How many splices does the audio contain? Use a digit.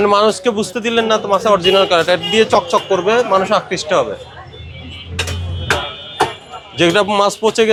0